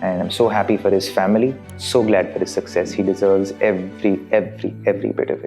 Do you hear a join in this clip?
yes; 1 cut; at 1.7 s

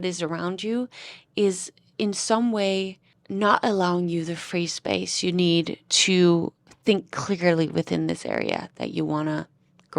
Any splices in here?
no; 0 cuts

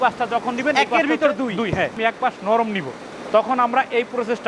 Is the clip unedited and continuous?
no; 1 cut; at 2.0 s

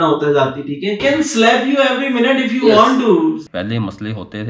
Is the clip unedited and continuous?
no; 2 cuts; at 1.0 s, 3.5 s

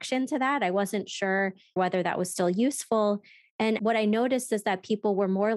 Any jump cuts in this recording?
yes; 2 cuts; at 1.8 s, 3.8 s

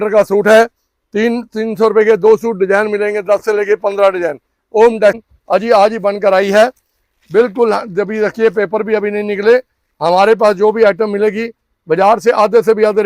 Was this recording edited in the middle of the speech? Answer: yes; 1 cut; at 5.2 s

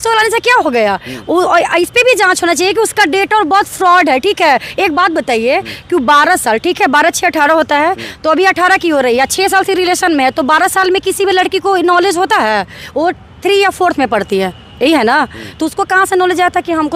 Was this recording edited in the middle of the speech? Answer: no; 0 cuts

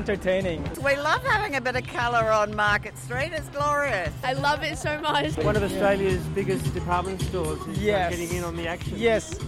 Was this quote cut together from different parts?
yes; 3 cuts; at 0.8 s, 4.2 s, 5.4 s

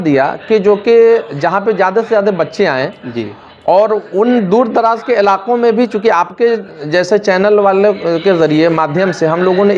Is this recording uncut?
yes; 0 cuts

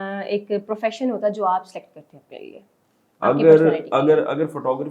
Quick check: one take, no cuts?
yes; 0 cuts

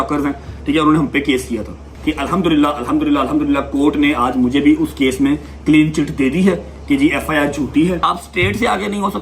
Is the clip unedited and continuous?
no; 2 cuts; at 1.9 s, 8.0 s

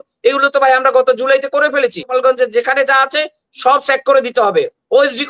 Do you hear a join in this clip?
yes; 1 cut; at 2.1 s

